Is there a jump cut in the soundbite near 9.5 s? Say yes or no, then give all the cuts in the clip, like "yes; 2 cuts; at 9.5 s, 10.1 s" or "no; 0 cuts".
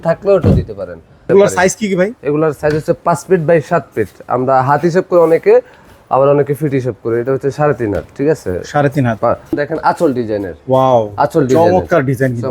yes; 2 cuts; at 1.2 s, 9.5 s